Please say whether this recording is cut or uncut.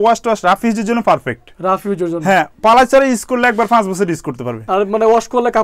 uncut